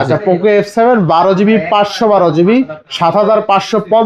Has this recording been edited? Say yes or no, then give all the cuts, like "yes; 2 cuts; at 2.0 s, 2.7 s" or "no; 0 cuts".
no; 0 cuts